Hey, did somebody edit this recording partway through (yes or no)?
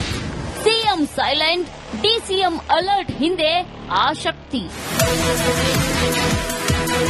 no